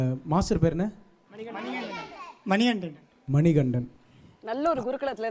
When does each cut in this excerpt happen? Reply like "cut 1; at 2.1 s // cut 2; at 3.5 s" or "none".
none